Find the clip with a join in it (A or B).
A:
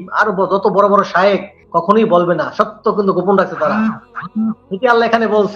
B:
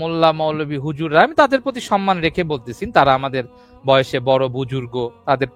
A